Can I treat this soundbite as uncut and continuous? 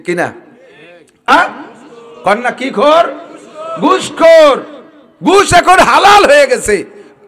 no; 1 cut; at 1.3 s

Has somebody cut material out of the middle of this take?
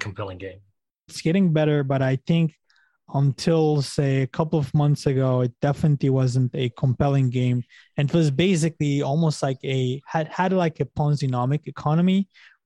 yes; 1 cut; at 1.1 s

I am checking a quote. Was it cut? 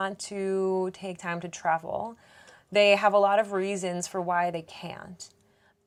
no; 0 cuts

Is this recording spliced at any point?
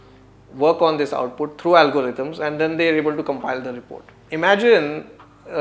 yes; 1 cut; at 4.2 s

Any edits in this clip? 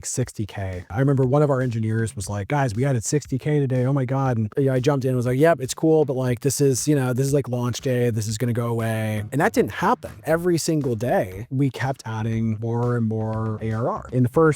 no; 0 cuts

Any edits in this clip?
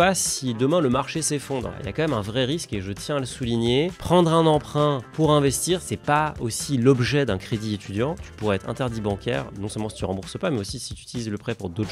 yes; 3 cuts; at 1.7 s, 5.9 s, 8.2 s

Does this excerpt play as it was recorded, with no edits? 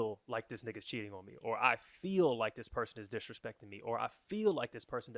yes; 0 cuts

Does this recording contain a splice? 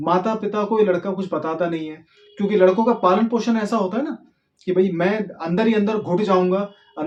no; 0 cuts

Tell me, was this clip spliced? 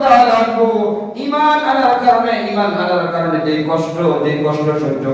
no; 0 cuts

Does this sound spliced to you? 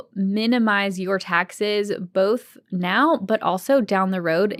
no; 0 cuts

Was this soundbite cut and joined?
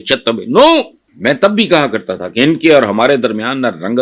yes; 1 cut; at 1.0 s

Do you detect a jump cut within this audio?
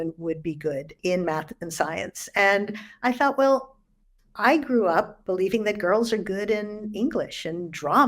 yes; 1 cut; at 0.9 s

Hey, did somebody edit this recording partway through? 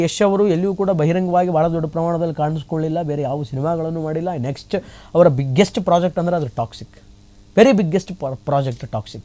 no; 0 cuts

